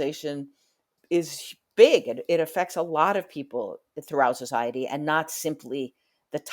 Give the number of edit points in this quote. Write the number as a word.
one